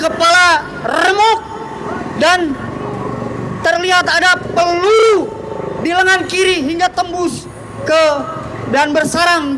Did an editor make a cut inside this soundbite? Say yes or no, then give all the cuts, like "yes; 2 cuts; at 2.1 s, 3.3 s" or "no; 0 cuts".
no; 0 cuts